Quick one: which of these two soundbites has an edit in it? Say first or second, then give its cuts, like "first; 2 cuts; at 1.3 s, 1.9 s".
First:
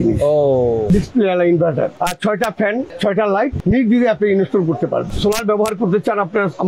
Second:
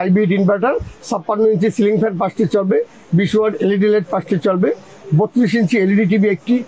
first; 3 cuts; at 0.9 s, 1.9 s, 5.1 s